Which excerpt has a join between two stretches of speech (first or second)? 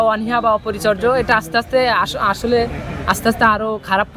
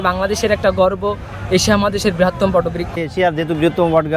second